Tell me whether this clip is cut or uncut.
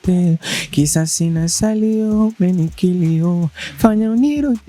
uncut